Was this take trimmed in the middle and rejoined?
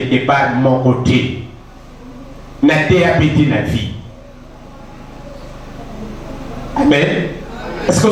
no; 0 cuts

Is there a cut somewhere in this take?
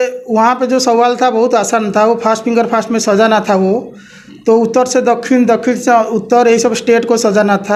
no; 0 cuts

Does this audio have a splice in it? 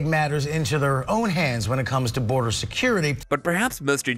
no; 0 cuts

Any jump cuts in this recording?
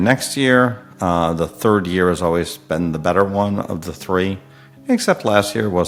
no; 0 cuts

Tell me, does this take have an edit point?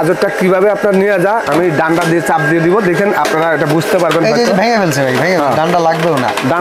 no; 0 cuts

